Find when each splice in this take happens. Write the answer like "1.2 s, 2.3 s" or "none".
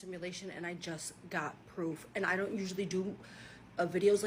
none